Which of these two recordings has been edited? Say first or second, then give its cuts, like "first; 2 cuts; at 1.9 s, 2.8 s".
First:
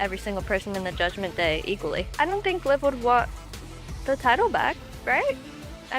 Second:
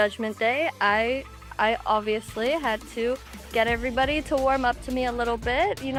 first; 1 cut; at 2.1 s